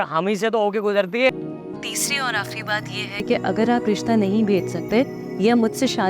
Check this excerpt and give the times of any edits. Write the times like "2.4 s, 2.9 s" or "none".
1.3 s